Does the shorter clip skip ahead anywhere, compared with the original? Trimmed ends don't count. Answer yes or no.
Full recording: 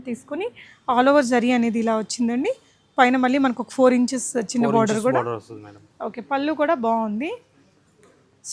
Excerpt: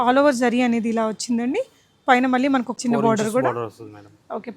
yes